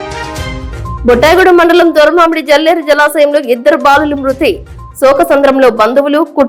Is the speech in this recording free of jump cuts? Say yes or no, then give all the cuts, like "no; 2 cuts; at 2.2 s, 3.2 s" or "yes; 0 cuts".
yes; 0 cuts